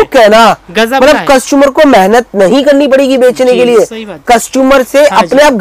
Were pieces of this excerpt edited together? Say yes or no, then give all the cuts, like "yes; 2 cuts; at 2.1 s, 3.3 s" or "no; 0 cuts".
no; 0 cuts